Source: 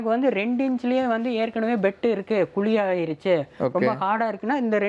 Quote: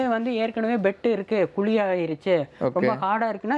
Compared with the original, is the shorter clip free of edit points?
yes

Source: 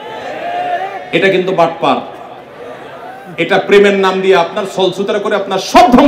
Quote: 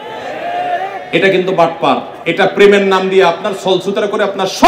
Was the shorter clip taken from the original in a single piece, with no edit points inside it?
no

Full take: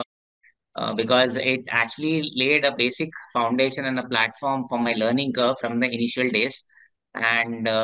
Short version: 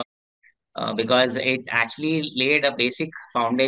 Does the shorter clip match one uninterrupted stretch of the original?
yes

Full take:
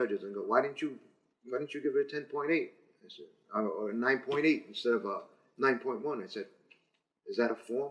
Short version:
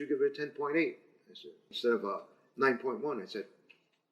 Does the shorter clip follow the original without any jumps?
no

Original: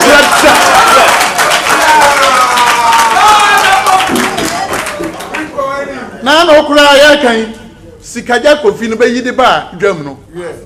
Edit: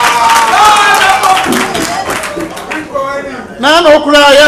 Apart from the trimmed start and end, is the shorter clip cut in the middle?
no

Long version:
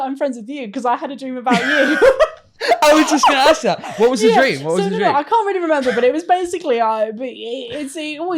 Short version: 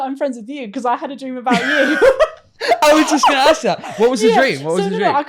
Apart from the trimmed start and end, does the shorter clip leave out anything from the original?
no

